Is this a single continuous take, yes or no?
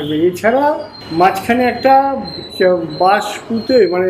no